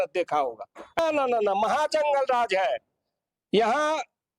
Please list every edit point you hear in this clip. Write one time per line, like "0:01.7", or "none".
0:01.0